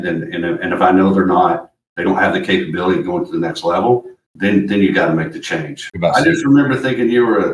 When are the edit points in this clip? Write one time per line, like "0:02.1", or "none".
0:05.9